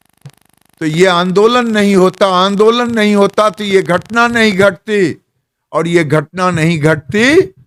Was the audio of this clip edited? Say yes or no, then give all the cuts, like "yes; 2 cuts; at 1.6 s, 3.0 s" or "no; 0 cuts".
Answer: no; 0 cuts